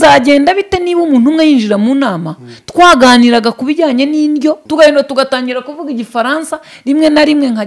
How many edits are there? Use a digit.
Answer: 1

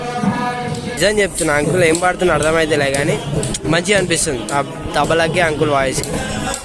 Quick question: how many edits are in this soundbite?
1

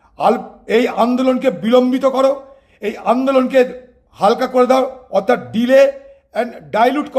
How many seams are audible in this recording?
0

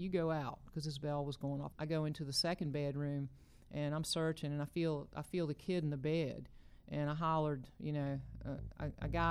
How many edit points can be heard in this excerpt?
1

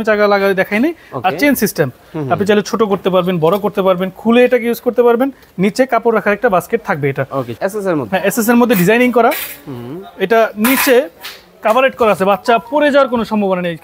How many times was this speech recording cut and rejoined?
1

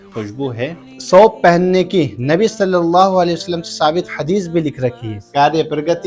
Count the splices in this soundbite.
2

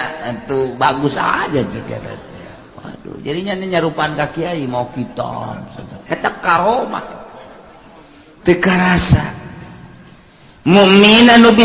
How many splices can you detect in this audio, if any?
0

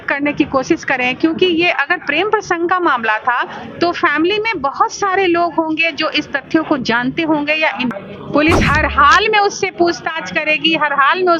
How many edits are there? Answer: 1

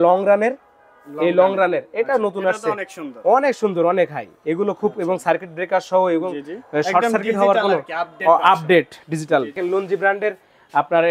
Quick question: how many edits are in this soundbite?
1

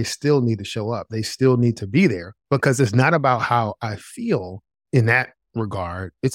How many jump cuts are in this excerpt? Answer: 1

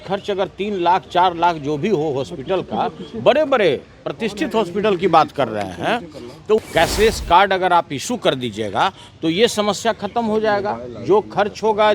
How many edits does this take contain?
1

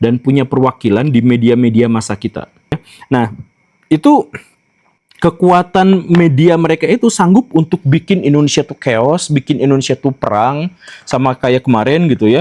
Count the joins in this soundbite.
1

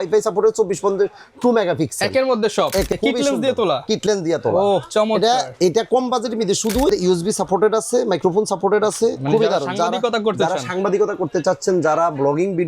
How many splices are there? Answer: 2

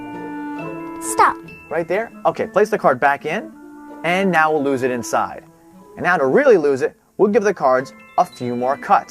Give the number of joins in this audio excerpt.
1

